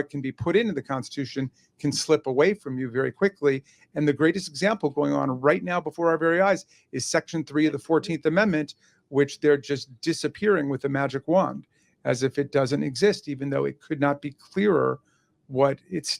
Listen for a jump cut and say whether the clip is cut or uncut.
cut